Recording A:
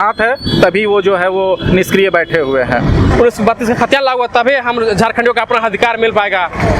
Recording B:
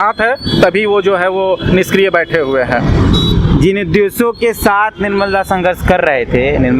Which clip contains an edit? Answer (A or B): A